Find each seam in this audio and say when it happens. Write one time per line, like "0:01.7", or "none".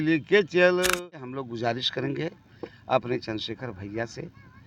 0:01.4

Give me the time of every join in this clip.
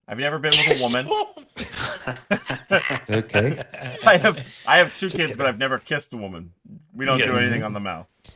none

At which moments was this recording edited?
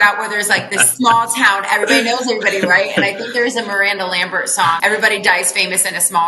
0:04.8

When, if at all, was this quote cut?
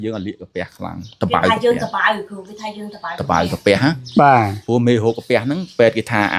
none

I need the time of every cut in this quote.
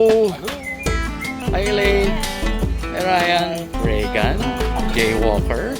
0:01.3
0:03.7

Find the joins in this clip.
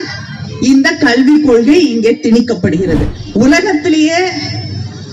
0:03.2

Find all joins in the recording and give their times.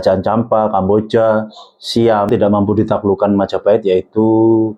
0:02.3

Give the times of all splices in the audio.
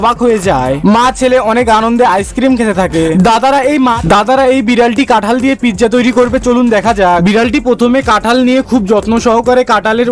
0:04.0

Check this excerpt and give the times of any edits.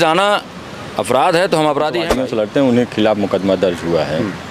0:02.1

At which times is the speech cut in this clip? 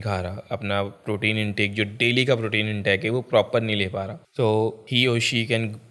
0:04.2
0:04.8

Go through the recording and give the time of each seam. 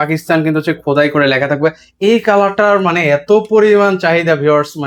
none

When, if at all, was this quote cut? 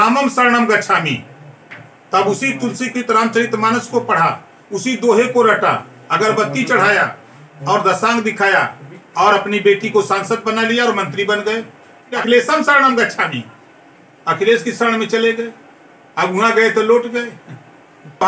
0:12.1

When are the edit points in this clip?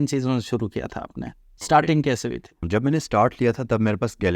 0:02.6

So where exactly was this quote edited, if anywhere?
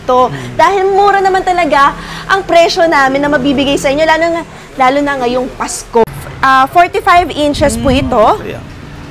0:06.0

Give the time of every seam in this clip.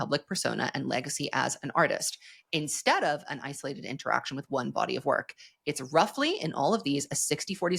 none

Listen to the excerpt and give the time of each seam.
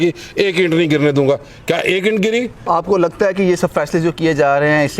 0:02.7

